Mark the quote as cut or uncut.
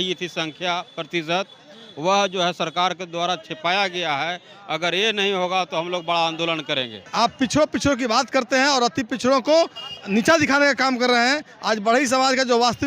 cut